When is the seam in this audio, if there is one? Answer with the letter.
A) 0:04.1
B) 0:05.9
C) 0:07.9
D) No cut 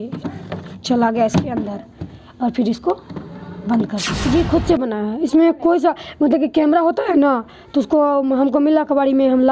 A